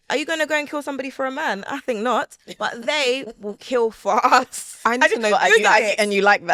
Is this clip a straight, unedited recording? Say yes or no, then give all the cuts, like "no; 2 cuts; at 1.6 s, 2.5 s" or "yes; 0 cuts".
yes; 0 cuts